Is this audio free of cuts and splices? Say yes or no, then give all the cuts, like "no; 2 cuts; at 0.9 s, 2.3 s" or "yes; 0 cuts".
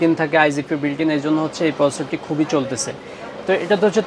yes; 0 cuts